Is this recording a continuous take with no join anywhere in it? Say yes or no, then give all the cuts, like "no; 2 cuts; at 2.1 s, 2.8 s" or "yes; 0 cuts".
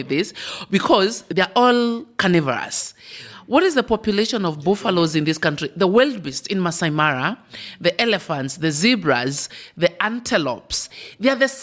yes; 0 cuts